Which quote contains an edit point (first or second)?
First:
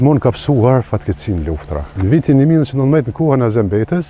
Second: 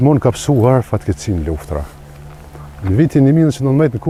first